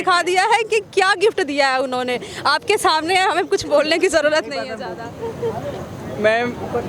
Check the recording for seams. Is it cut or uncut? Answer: uncut